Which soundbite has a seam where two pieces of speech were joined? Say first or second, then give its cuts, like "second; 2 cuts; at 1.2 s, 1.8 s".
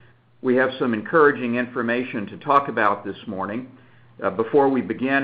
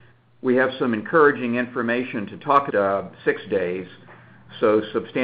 first; 1 cut; at 2.7 s